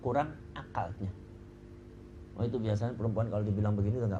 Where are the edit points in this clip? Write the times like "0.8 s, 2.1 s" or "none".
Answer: none